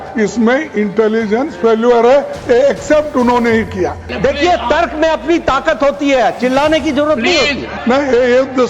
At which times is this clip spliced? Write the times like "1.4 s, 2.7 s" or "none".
4.1 s, 7.7 s